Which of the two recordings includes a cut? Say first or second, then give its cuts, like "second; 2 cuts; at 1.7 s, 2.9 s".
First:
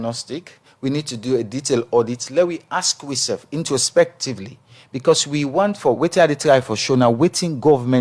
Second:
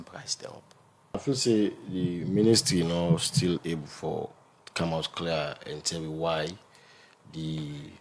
second; 1 cut; at 1.2 s